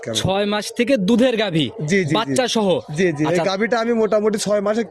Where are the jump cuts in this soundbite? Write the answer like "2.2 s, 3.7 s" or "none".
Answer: none